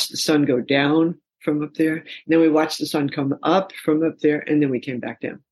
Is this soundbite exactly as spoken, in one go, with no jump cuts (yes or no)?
yes